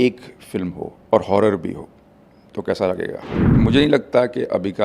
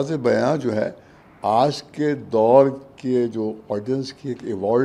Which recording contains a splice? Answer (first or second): first